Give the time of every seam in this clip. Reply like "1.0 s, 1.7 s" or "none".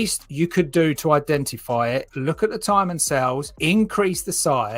2.1 s